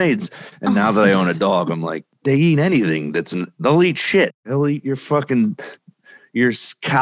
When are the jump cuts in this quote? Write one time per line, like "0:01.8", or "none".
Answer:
0:04.4